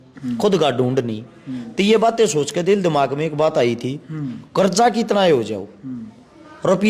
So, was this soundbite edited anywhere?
no; 0 cuts

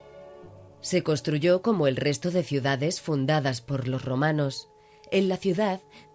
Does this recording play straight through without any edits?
no; 1 cut; at 1.8 s

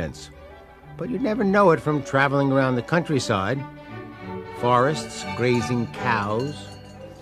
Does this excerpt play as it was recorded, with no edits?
yes; 0 cuts

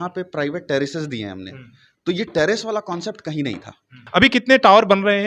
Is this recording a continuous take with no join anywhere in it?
no; 1 cut; at 4.0 s

